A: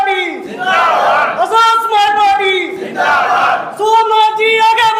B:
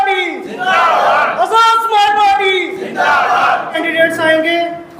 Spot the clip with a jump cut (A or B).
B